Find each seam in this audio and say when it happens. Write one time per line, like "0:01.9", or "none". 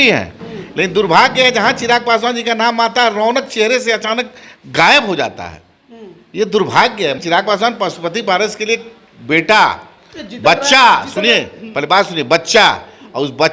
0:07.2